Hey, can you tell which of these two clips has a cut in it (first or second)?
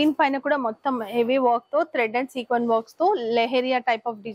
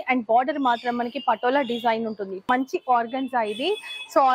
second